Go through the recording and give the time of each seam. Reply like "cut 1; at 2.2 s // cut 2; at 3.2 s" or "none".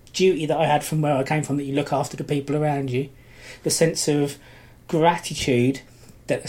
none

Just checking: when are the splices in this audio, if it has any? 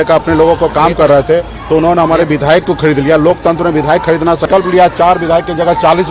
cut 1; at 4.4 s

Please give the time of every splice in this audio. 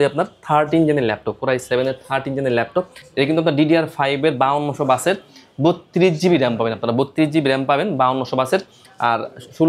none

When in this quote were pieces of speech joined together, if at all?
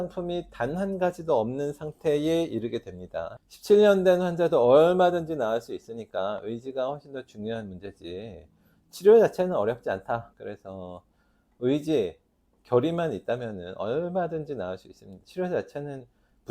cut 1; at 3.3 s // cut 2; at 10.3 s // cut 3; at 15.1 s

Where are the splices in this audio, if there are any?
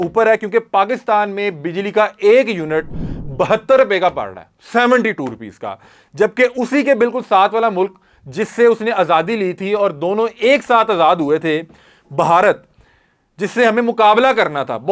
none

